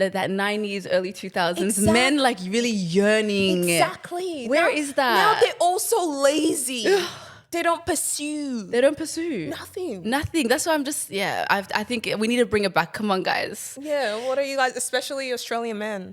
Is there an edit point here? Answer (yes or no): no